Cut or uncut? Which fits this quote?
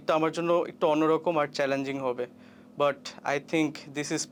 uncut